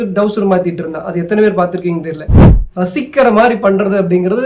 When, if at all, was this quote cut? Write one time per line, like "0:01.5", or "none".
0:02.5